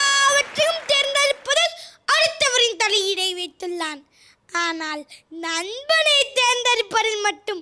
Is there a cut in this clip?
no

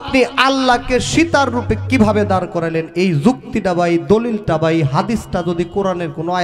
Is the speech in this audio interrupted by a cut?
no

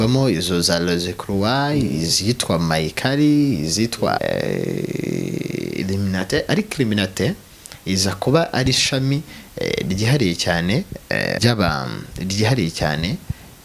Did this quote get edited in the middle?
yes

